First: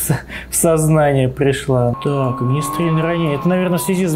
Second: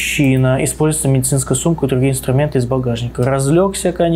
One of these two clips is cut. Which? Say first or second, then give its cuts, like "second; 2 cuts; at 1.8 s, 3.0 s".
first; 1 cut; at 2.0 s